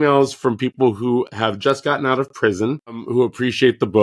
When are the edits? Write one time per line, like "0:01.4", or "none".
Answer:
0:03.0

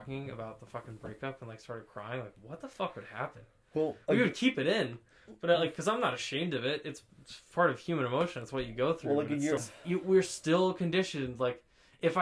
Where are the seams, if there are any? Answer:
0:09.6

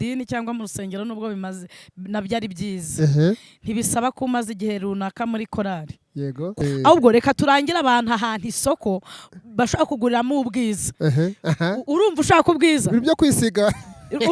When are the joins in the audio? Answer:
0:06.5

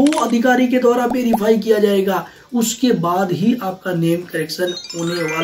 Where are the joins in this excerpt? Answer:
none

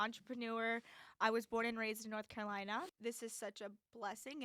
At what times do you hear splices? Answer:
0:02.9

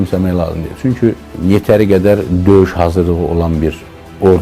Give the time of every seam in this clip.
0:01.3

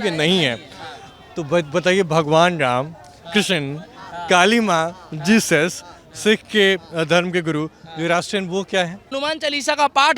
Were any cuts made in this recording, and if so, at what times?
0:09.1

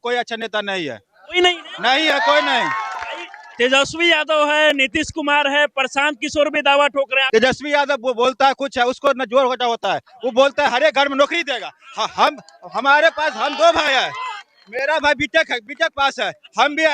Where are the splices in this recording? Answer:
0:07.2

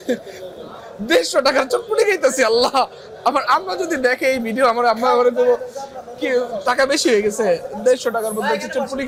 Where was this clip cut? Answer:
none

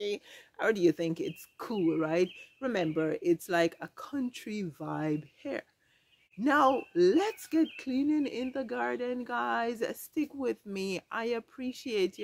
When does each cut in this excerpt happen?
none

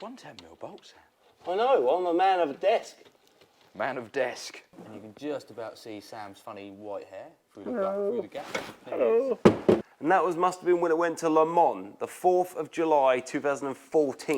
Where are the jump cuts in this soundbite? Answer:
0:04.8
0:09.9

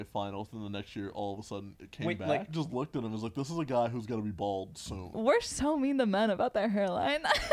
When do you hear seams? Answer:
0:02.5
0:05.1

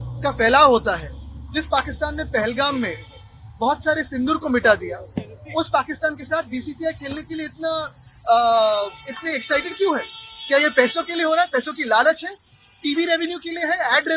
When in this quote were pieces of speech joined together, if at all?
none

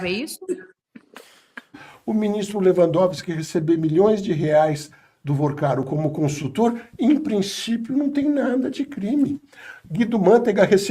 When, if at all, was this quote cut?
0:01.8

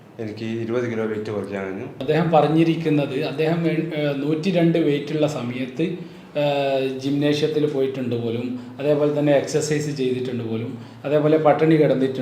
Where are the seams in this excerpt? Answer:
0:01.9

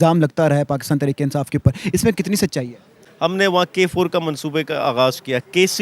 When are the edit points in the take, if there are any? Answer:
0:03.0

